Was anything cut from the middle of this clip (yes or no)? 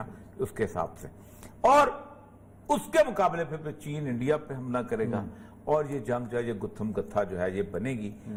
no